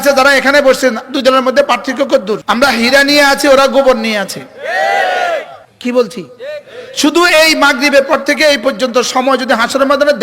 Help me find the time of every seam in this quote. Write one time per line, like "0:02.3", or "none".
0:02.4
0:05.6